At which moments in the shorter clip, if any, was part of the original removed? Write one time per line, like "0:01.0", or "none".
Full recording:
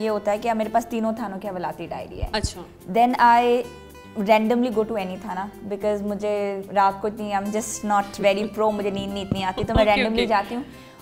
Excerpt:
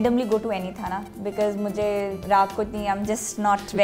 none